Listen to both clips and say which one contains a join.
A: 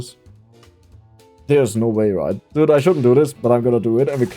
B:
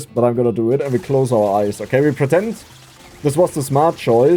A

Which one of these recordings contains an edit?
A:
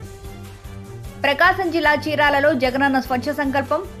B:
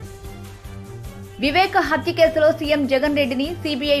B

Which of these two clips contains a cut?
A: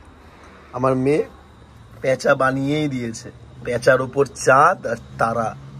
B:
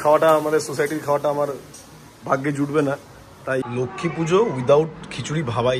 B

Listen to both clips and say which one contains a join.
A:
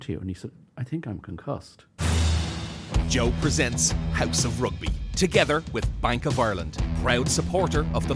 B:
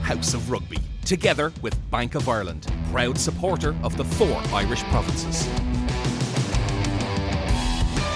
A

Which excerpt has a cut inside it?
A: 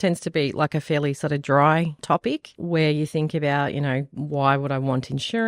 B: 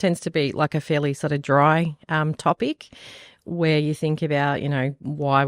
A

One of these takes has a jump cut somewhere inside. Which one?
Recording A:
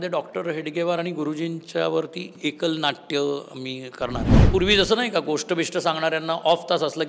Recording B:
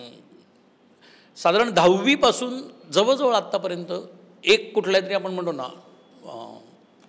A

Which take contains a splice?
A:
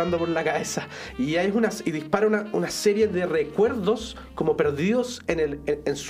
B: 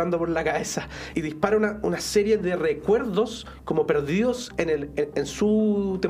B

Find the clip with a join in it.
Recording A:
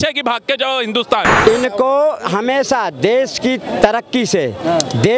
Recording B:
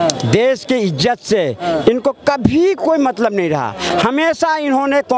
A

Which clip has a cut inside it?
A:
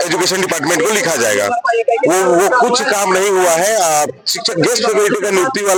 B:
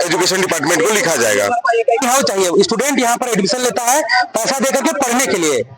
B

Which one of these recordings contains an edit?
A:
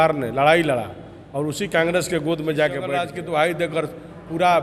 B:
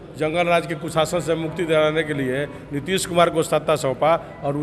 A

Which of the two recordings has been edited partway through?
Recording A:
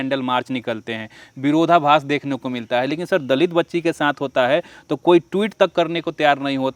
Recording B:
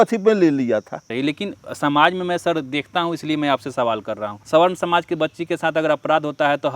B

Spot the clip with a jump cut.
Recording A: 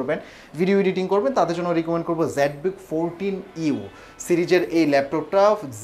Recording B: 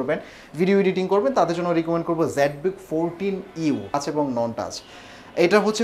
B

